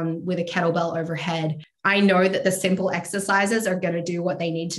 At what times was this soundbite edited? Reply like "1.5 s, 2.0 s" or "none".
1.7 s